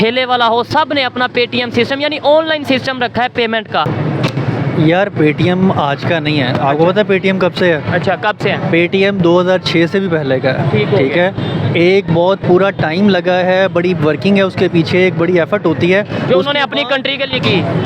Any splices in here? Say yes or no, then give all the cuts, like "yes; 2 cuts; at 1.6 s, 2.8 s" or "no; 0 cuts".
yes; 1 cut; at 3.9 s